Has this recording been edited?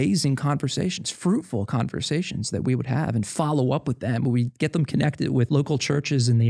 yes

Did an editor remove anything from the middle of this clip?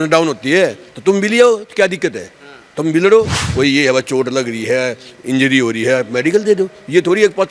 yes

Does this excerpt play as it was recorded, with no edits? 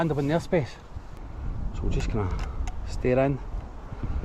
no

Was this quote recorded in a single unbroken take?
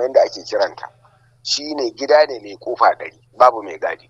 no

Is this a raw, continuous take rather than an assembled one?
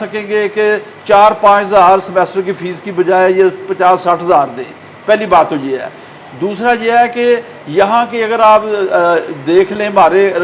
yes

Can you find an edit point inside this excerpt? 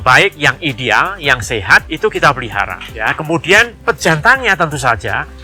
no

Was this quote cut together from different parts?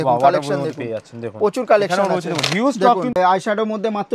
yes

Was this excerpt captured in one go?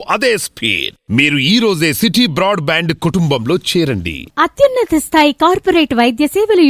yes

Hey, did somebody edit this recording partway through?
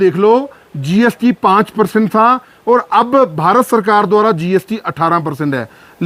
no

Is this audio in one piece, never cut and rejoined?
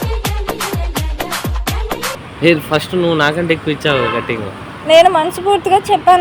no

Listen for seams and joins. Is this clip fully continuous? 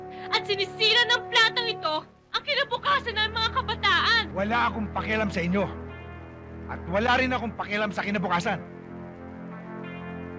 no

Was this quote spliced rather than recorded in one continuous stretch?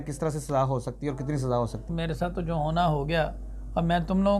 yes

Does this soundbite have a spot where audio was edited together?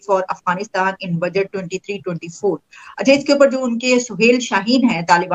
no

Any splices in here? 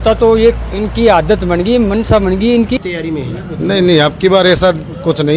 yes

